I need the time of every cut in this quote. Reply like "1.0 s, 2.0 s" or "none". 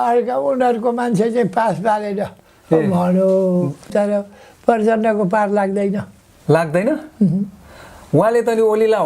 3.8 s